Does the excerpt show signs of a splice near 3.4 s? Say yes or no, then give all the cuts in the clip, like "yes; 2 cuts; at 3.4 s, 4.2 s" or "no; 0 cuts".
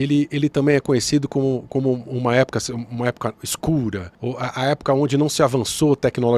no; 0 cuts